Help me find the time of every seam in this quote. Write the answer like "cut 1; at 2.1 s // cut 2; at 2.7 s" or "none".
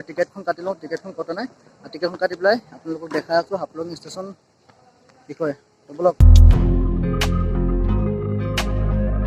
none